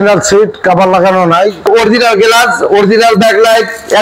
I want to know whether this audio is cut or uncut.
cut